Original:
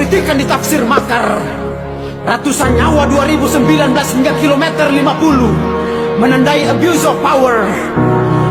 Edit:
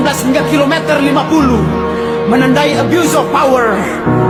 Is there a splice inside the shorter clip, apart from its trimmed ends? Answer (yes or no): no